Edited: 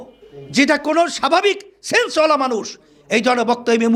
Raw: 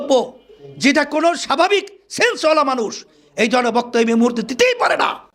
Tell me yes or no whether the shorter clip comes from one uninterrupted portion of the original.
yes